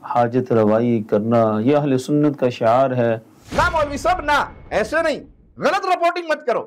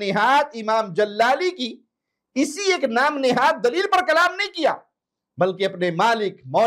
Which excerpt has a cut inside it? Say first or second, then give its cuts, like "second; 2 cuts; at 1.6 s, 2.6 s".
first; 1 cut; at 3.4 s